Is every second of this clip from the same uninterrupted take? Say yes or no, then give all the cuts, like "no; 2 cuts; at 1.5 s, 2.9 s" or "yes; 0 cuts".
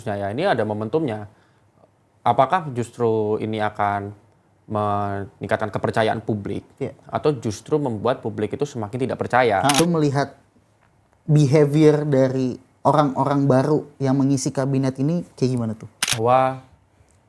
no; 2 cuts; at 9.8 s, 16.1 s